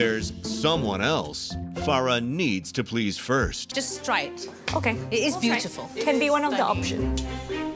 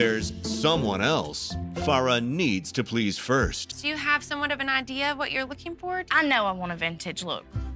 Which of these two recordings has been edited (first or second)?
second